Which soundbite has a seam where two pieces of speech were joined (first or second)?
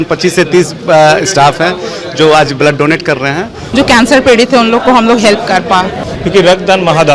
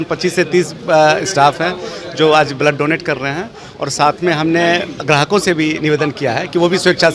first